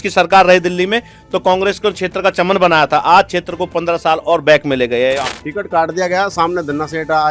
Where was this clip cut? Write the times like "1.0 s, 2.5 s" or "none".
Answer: 5.3 s

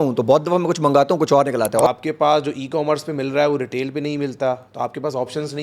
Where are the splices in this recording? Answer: 1.9 s

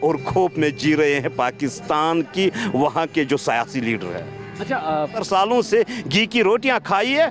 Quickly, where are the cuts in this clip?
5.2 s

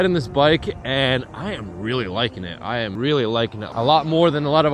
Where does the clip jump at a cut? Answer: 2.9 s, 3.6 s

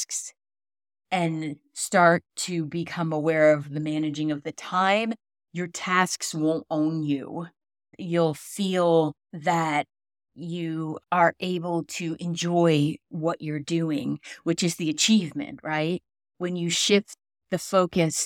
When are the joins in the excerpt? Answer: none

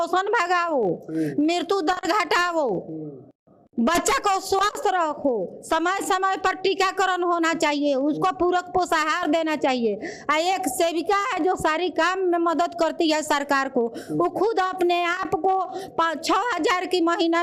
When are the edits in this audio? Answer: none

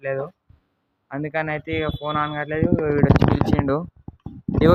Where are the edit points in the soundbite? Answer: none

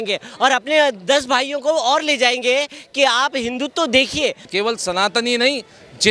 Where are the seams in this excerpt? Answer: 4.5 s

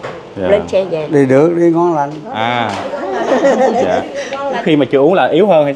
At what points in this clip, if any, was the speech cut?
1.0 s, 4.6 s

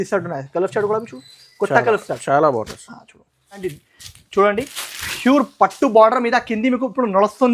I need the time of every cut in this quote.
3.6 s

